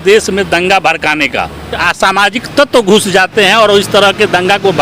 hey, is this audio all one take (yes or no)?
no